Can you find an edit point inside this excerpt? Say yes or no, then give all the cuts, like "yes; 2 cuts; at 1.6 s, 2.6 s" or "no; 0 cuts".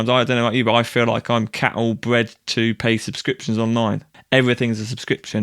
yes; 1 cut; at 4.1 s